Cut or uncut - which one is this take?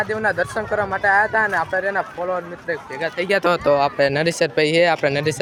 uncut